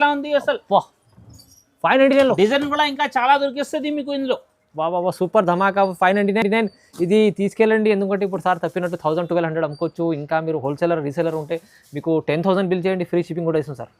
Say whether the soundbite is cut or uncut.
uncut